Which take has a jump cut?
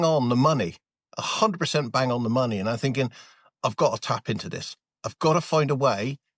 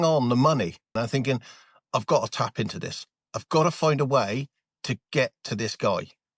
second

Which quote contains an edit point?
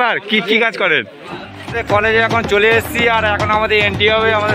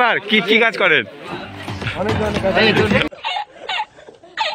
first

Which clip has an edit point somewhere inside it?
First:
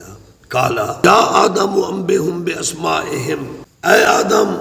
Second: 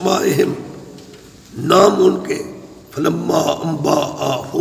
first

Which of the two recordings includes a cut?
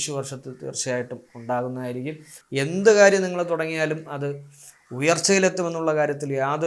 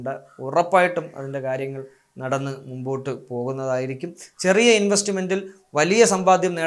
first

